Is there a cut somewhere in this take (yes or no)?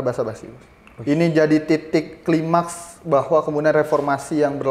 no